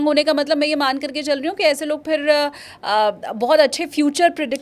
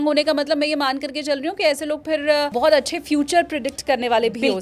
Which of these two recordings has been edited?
second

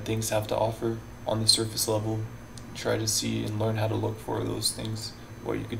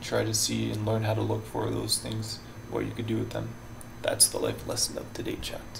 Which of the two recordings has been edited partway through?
first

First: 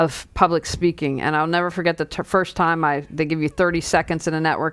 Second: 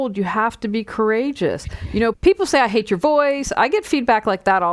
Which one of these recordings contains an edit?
second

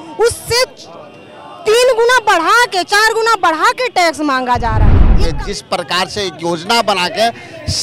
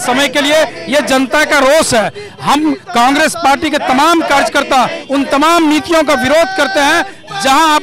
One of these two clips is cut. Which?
first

